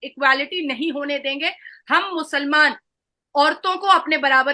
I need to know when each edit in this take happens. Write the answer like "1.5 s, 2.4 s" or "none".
none

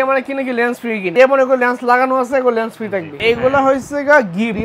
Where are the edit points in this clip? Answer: 1.1 s, 3.1 s

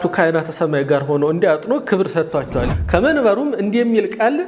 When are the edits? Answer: 2.7 s

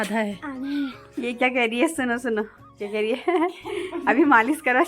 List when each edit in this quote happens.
1.0 s

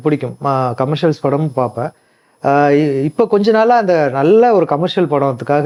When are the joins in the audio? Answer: none

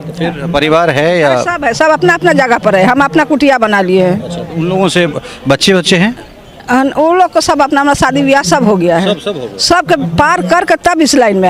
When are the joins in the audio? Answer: none

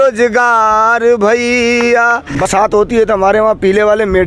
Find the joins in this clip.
2.5 s

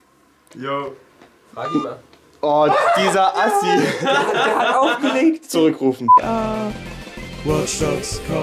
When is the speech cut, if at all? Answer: 6.0 s

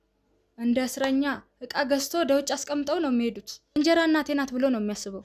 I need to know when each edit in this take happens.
3.7 s

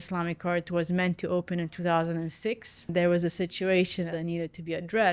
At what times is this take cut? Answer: 2.9 s, 4.1 s

